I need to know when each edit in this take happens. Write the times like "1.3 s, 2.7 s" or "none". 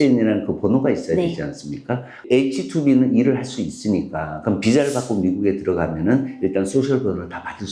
none